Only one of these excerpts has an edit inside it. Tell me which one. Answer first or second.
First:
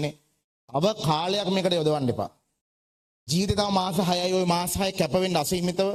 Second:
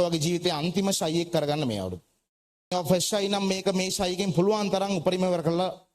second